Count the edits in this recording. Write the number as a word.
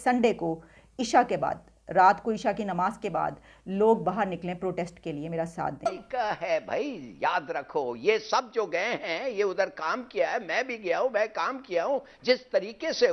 one